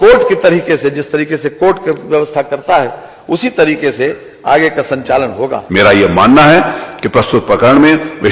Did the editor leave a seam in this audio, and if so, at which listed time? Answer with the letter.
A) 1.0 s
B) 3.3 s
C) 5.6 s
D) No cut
C